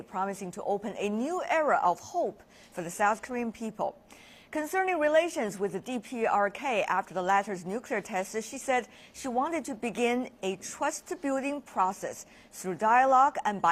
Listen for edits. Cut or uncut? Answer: uncut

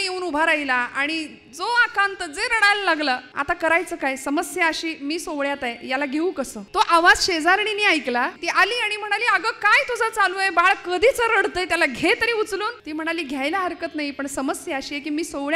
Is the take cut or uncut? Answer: cut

